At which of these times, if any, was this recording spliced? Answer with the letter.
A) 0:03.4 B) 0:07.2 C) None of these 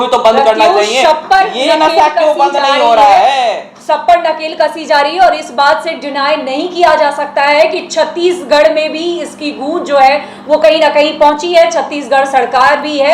C